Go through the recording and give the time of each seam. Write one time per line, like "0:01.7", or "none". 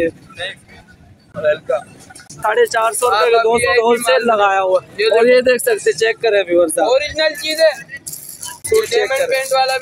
0:02.4